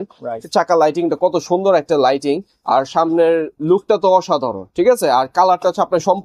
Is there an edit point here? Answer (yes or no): no